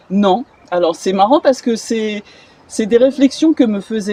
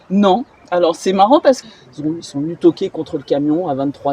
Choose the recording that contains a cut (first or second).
second